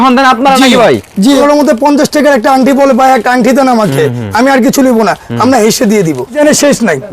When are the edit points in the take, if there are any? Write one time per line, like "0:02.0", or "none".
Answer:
0:01.4
0:06.4